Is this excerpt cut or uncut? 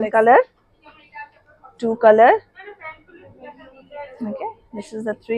uncut